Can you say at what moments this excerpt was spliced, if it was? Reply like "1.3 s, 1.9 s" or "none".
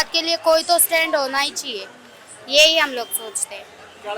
none